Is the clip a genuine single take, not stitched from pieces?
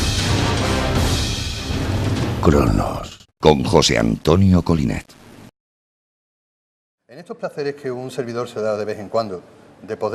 no; 1 cut; at 1.2 s

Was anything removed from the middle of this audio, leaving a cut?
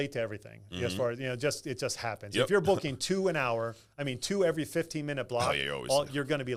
no; 0 cuts

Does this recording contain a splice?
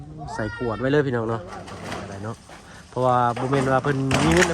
yes; 1 cut; at 1.8 s

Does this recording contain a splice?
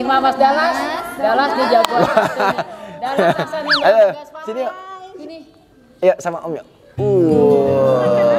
no; 0 cuts

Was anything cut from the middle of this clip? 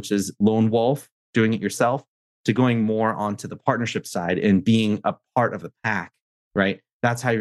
no; 0 cuts

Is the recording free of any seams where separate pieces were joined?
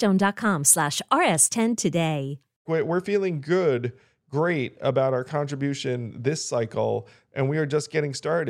no; 1 cut; at 2.7 s

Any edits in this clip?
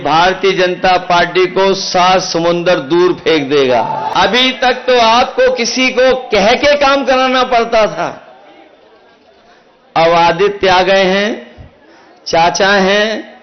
yes; 1 cut; at 4.1 s

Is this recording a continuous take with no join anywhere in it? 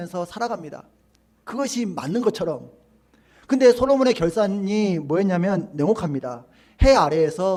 yes; 0 cuts

